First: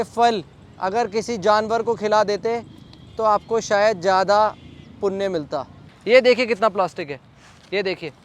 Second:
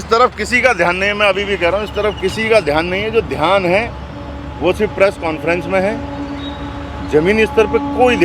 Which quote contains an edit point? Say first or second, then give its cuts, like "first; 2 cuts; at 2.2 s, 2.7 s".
first; 1 cut; at 5.9 s